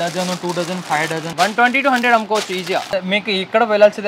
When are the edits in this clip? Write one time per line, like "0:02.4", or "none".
0:01.3
0:03.0